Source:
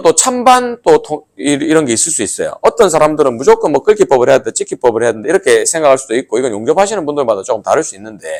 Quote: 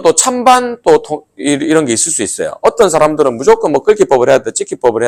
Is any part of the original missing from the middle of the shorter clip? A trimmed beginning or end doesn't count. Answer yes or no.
no